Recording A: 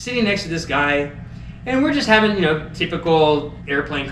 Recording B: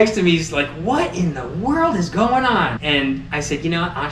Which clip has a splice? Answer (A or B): B